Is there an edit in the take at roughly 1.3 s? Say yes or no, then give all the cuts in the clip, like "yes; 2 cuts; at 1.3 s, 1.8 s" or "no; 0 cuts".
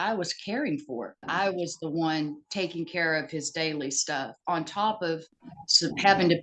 yes; 1 cut; at 1.3 s